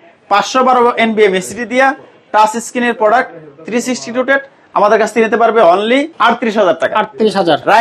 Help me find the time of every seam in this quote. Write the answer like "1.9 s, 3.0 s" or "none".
6.1 s